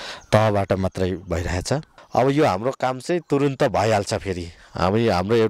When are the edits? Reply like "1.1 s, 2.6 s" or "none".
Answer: 1.9 s